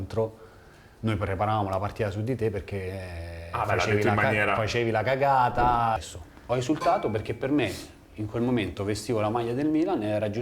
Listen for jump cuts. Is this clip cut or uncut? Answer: cut